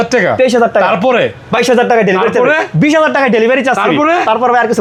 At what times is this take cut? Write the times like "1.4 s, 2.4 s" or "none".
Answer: none